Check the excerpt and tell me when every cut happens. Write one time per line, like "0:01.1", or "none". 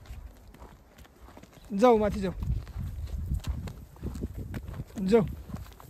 none